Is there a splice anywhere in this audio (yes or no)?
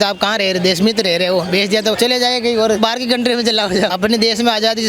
yes